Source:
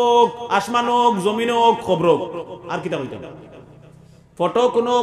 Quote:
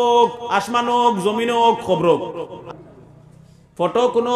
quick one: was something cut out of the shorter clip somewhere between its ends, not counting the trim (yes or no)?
yes